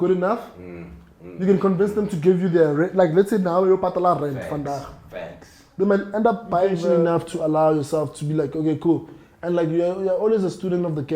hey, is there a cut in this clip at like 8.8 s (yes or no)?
no